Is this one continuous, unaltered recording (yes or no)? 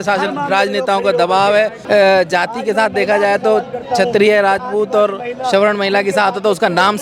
no